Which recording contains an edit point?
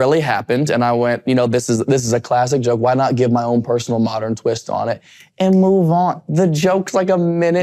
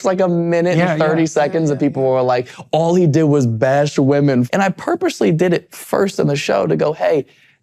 second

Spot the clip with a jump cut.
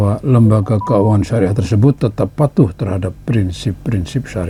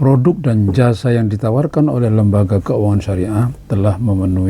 second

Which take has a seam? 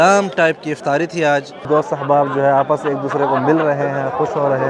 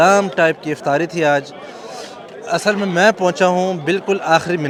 first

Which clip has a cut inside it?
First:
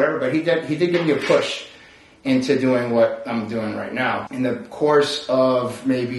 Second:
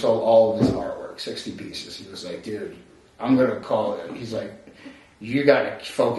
first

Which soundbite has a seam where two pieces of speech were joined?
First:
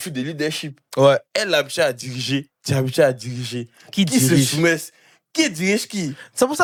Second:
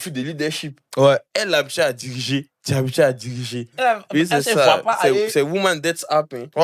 second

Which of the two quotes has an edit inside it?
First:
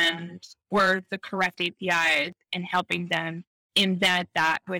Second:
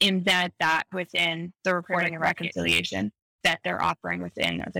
second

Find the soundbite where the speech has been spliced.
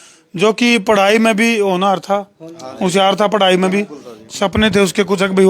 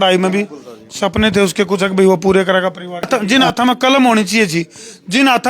second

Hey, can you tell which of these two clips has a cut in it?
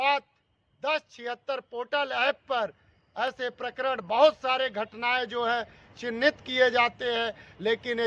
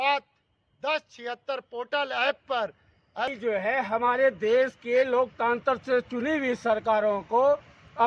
second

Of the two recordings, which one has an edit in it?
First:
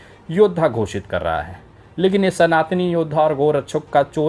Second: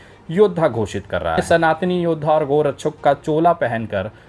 second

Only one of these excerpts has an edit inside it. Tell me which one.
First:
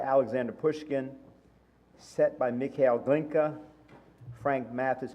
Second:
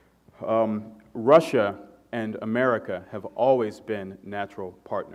first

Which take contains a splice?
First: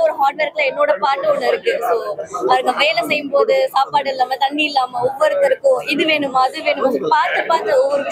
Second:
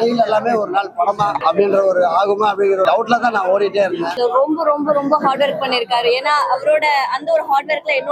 second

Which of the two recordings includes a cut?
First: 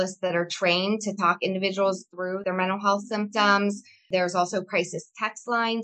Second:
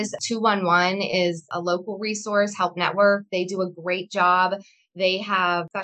first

